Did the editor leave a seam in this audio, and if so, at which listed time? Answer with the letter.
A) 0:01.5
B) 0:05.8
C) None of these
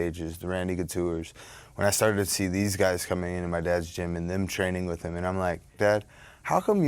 B